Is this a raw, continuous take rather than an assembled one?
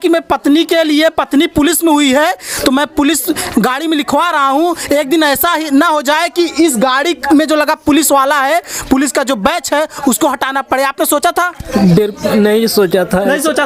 yes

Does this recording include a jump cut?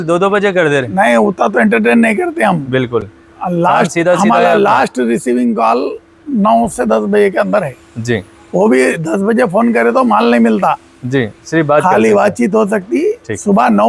no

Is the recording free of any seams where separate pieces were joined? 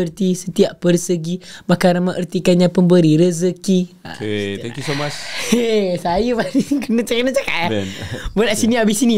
no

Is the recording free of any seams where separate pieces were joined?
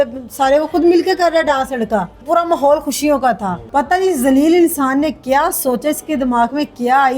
no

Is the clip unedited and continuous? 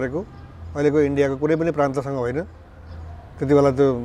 yes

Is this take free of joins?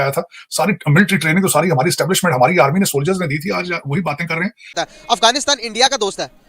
no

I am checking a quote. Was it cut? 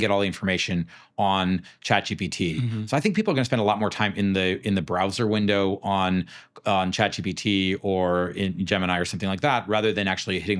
no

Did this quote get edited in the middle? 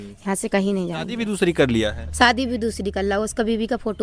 yes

